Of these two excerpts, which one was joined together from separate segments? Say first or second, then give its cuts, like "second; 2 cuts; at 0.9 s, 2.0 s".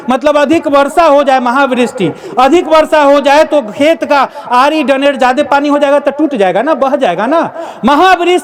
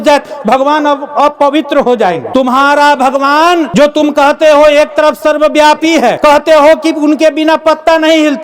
second; 3 cuts; at 2.2 s, 3.7 s, 6.2 s